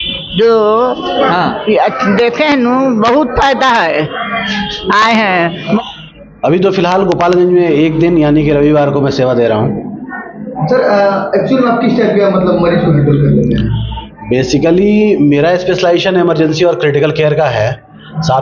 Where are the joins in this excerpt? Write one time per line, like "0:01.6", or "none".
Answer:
0:05.8